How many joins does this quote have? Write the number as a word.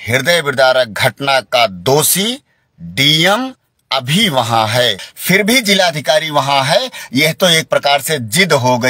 one